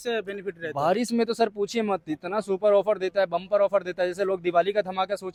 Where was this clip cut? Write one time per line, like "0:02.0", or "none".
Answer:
none

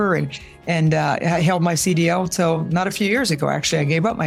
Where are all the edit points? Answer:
none

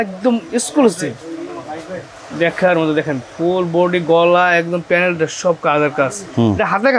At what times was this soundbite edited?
none

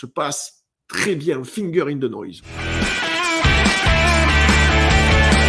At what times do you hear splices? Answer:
0:02.5

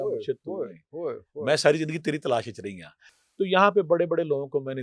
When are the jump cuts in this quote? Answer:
none

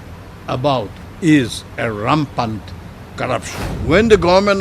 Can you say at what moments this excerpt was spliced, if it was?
0:01.0
0:03.6

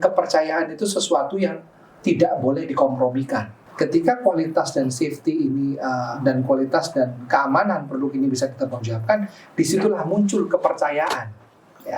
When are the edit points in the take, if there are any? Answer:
0:03.6

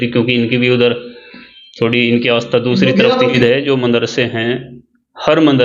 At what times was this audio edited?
0:03.4

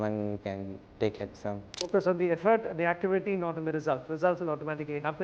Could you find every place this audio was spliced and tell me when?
0:01.9

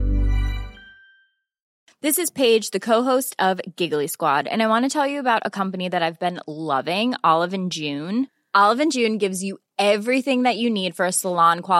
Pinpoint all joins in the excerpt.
0:01.8

